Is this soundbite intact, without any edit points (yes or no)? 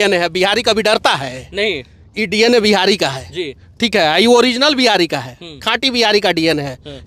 yes